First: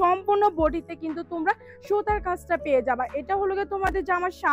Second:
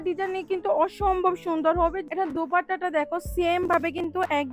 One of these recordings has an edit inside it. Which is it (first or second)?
second